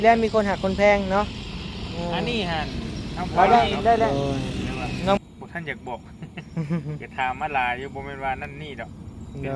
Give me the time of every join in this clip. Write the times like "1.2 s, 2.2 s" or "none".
5.2 s